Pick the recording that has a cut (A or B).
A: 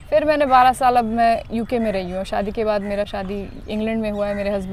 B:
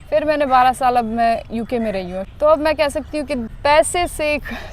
B